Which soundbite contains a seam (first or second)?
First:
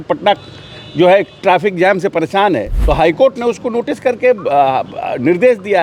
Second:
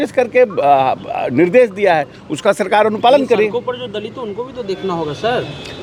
first